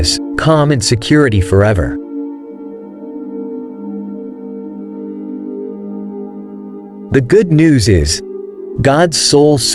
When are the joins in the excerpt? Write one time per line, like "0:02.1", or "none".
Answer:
0:01.8
0:07.1